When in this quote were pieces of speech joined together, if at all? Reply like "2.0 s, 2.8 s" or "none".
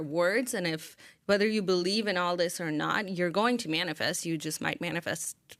none